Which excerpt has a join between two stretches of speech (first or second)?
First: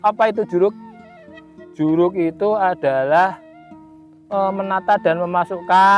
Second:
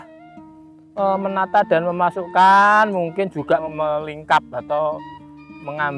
second